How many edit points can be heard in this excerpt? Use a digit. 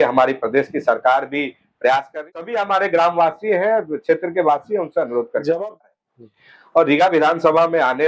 2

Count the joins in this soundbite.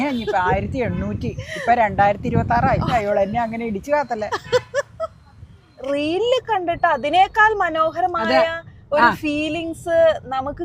2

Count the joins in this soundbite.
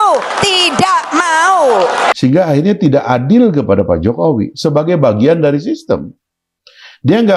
1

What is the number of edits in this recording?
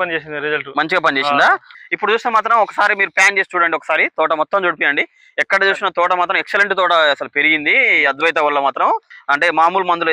2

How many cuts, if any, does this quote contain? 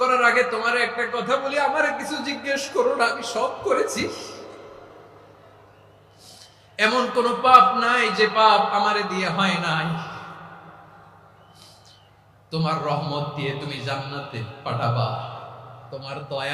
0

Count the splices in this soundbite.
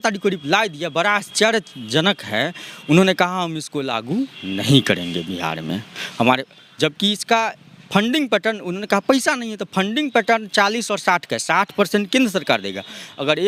0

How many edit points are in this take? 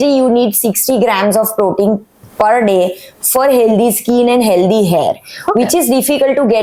0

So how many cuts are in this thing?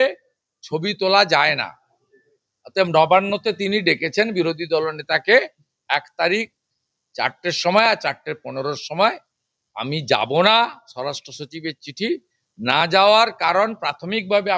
0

